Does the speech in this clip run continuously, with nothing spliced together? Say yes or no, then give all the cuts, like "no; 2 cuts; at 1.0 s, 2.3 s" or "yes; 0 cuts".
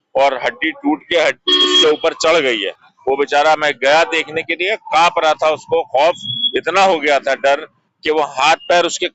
yes; 0 cuts